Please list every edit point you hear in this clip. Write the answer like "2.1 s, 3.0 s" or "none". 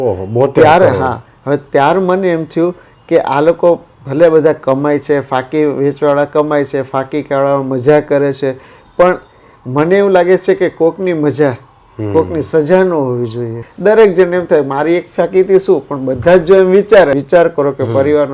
13.7 s, 17.2 s

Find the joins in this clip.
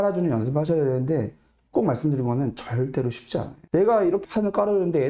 3.6 s

